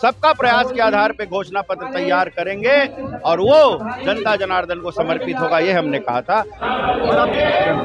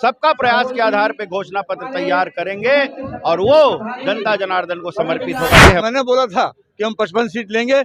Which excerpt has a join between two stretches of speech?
second; 1 cut; at 5.8 s

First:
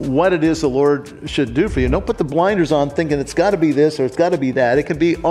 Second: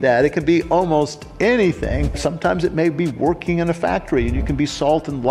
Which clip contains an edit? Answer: second; 1 cut; at 2.2 s

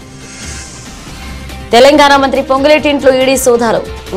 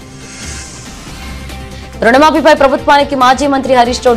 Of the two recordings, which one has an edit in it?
first; 1 cut; at 1.4 s

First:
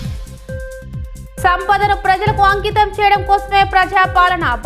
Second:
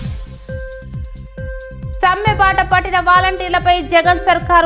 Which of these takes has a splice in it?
first; 1 cut; at 1.4 s

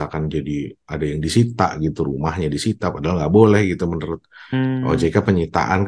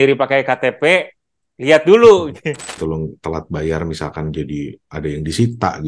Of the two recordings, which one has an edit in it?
second; 1 cut; at 2.8 s

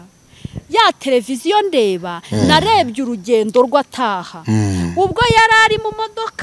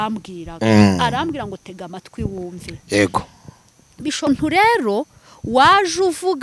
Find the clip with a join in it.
second; 1 cut; at 4.3 s

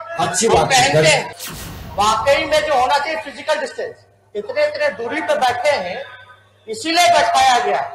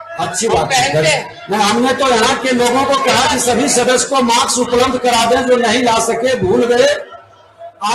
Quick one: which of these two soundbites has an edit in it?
first; 1 cut; at 1.3 s

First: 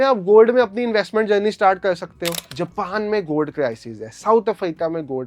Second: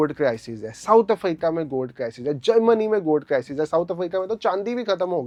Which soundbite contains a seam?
first; 1 cut; at 2.3 s

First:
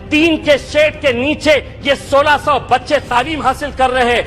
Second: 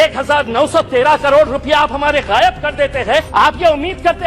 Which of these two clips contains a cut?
second; 1 cut; at 3.3 s

